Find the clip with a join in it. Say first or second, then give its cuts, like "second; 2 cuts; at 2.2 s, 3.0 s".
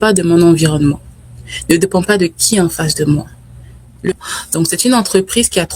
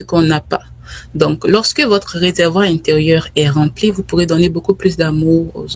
first; 1 cut; at 4.1 s